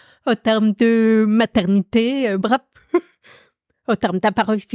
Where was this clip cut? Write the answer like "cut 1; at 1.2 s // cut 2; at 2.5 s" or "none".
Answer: none